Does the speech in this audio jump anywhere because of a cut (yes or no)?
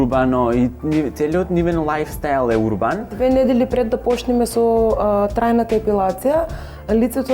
yes